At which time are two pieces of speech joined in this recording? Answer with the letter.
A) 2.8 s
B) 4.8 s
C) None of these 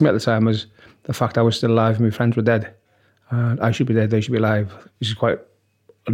B